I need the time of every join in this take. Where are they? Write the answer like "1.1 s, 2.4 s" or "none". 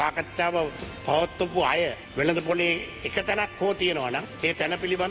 2.1 s